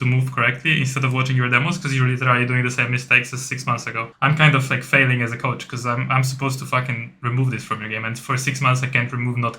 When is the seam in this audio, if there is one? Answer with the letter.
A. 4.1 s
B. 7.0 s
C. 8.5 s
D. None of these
A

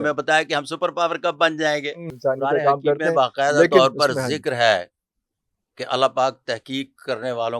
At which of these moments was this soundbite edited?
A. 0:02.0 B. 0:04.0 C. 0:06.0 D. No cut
A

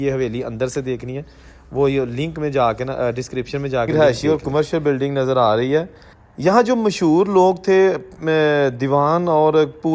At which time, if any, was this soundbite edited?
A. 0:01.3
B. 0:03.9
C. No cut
B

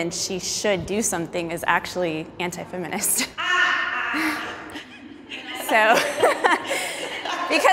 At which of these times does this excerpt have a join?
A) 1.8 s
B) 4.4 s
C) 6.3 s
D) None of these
D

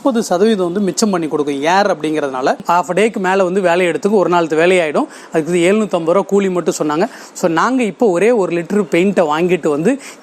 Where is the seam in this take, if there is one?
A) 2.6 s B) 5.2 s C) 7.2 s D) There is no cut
A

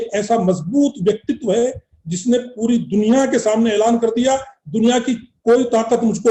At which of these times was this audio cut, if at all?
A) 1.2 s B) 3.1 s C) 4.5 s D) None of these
D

